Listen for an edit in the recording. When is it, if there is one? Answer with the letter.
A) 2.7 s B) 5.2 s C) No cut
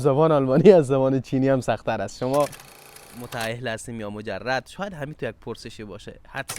A